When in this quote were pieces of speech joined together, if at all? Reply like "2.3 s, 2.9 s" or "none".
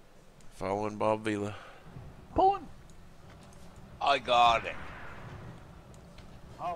none

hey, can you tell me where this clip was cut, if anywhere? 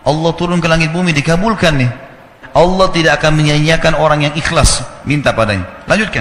2.4 s

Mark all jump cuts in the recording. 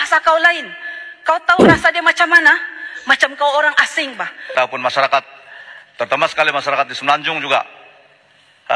4.5 s

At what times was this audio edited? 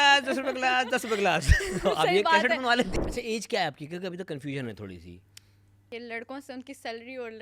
2.9 s, 5.9 s

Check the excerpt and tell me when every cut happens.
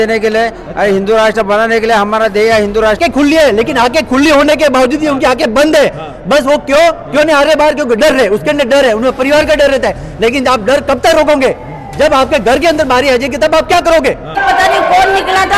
3.0 s, 14.4 s

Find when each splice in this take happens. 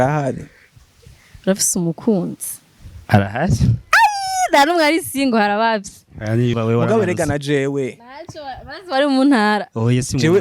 6.6 s

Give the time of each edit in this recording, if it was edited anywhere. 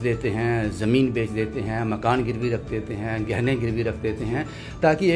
none

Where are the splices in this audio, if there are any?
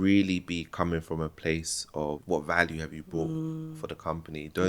2.2 s

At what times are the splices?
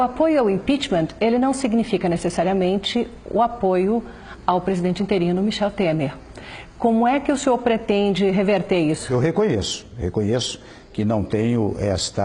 9.1 s

